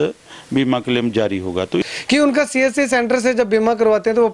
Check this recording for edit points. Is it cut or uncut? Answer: cut